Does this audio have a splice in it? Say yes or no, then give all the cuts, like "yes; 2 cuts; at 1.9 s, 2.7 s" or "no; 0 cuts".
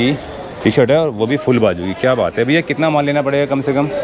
no; 0 cuts